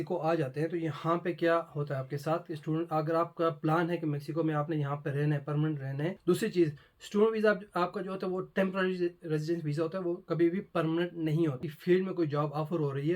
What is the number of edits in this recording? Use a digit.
2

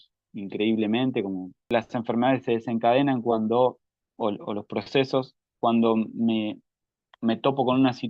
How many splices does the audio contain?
1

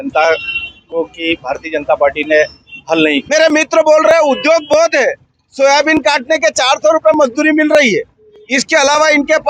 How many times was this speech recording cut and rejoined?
1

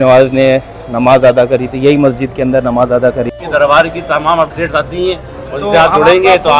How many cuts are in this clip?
1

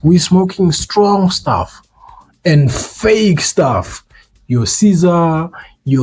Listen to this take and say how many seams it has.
0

